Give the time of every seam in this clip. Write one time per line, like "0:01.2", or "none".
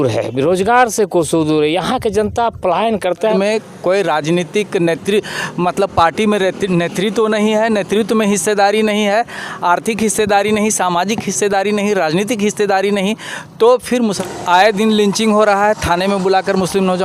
0:03.3
0:14.2